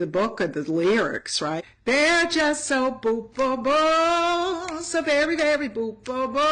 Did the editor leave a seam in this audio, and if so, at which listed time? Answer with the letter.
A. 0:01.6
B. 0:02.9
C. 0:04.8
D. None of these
A